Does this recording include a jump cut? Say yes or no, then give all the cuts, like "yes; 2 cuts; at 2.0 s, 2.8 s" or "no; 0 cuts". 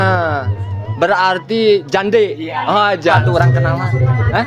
yes; 1 cut; at 3.2 s